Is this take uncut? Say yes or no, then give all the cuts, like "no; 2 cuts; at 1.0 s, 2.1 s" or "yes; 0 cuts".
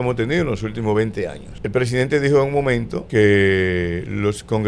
no; 2 cuts; at 1.5 s, 3.0 s